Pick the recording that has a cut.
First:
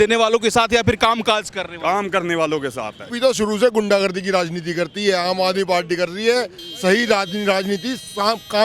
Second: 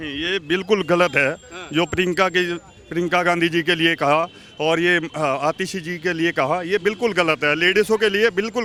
first; 1 cut; at 3.0 s

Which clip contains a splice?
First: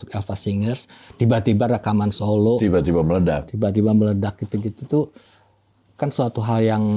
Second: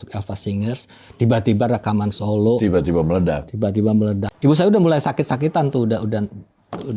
second; 1 cut; at 4.3 s

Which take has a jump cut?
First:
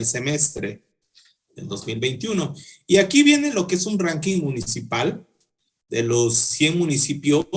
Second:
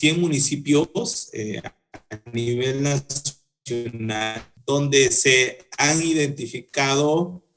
second; 1 cut; at 4.5 s

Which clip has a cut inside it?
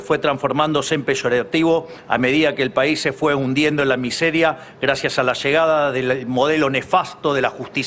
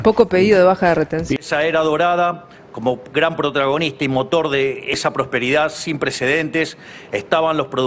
second; 1 cut; at 1.3 s

